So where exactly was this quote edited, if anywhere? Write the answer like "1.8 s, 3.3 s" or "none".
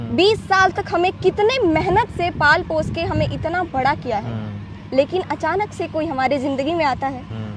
none